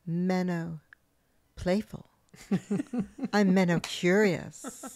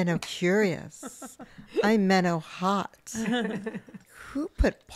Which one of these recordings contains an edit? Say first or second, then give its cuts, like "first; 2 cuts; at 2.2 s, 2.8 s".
second; 1 cut; at 4.1 s